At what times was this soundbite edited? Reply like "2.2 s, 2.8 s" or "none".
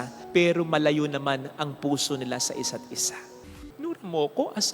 3.3 s